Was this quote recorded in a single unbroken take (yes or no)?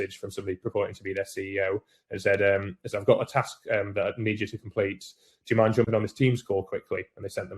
yes